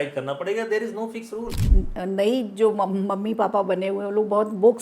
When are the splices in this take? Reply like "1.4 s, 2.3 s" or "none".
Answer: 1.6 s